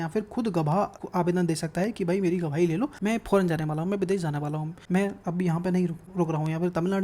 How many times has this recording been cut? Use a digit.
4